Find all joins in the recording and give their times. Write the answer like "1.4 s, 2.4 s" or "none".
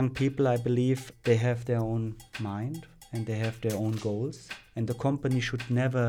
1.1 s, 2.3 s, 3.2 s, 4.8 s